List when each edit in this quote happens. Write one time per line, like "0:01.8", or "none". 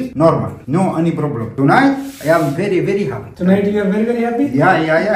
none